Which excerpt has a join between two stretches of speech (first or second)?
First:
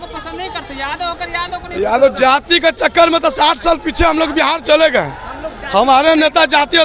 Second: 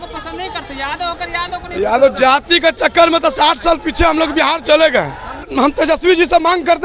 second